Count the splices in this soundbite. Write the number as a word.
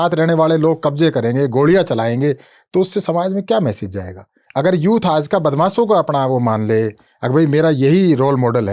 one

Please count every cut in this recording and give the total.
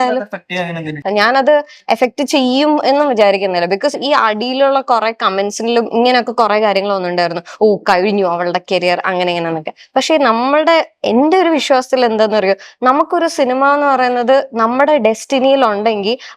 one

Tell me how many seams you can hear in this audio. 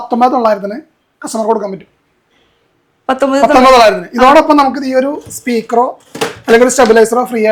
zero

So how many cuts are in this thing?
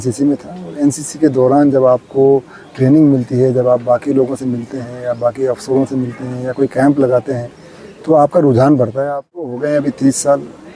one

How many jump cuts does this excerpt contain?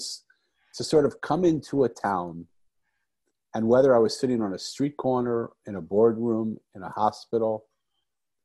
zero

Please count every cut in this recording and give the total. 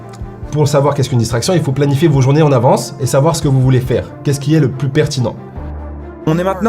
one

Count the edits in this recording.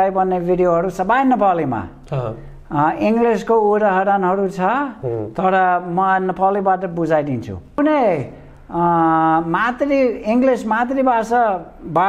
one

